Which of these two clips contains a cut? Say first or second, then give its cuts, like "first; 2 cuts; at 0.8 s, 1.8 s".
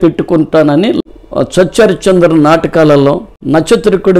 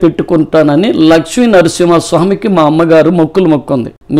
first; 2 cuts; at 1.0 s, 3.3 s